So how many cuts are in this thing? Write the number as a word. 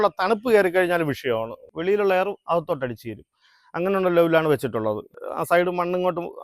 two